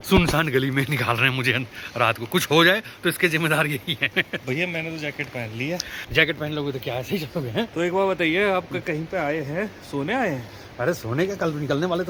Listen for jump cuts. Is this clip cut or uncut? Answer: uncut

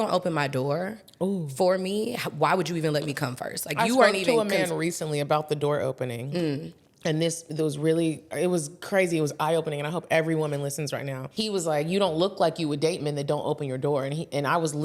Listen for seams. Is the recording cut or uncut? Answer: cut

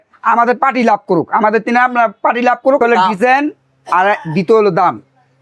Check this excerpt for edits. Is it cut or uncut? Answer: cut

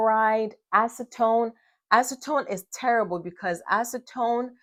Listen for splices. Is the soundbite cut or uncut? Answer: uncut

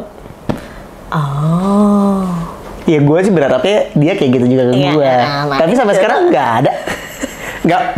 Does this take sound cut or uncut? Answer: uncut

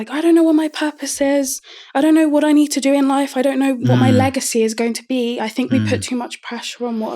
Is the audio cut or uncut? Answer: cut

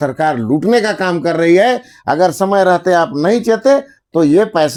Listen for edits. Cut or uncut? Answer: uncut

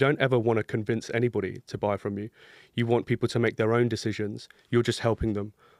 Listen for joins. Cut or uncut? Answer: uncut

